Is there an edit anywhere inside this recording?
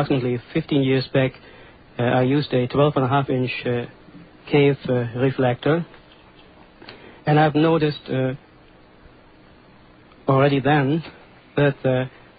no; 0 cuts

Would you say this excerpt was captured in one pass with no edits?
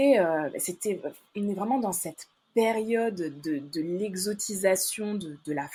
yes; 0 cuts

